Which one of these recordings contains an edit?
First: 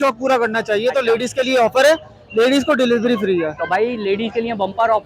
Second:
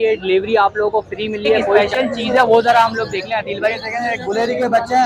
second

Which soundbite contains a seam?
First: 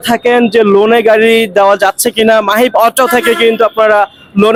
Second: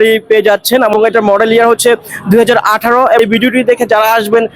second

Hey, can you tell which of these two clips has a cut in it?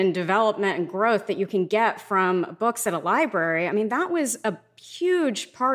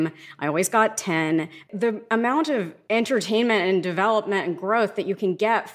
second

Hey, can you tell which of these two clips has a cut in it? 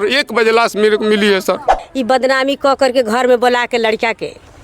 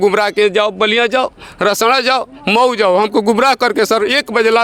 first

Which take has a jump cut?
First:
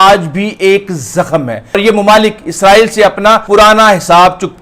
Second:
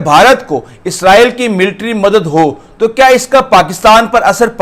first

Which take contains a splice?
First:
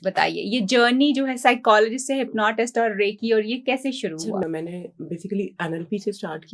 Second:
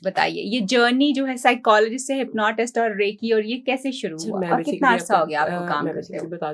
first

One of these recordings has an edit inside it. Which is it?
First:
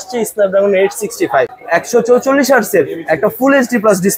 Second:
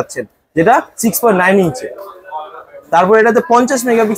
first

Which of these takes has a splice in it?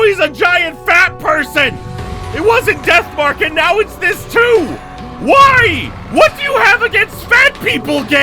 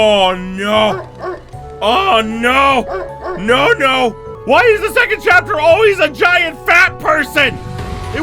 second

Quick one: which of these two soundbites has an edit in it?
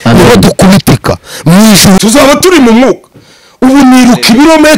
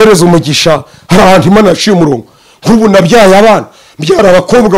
first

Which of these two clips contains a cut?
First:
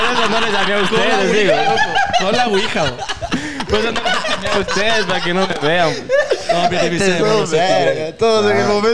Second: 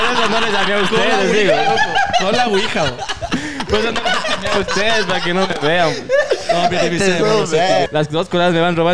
second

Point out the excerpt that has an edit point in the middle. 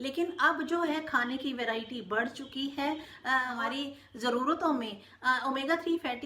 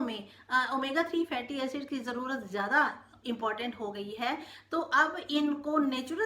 first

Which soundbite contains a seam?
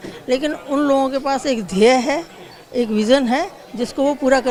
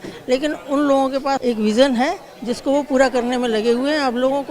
second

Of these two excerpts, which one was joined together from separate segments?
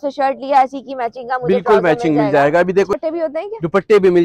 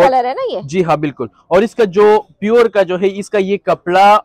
first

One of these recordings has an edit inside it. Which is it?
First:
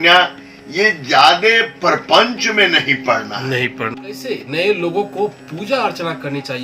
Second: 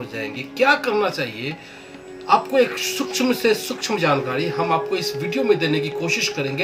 first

